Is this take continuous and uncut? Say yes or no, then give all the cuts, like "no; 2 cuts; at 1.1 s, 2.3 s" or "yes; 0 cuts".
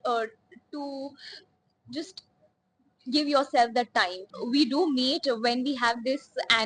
no; 1 cut; at 4.2 s